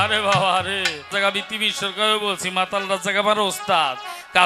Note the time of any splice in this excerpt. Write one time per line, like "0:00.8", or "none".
0:01.1